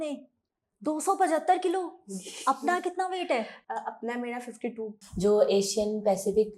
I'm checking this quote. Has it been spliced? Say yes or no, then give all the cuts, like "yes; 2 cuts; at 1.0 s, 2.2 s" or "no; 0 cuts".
yes; 1 cut; at 5.0 s